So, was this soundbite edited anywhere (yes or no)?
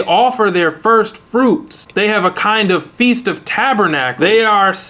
yes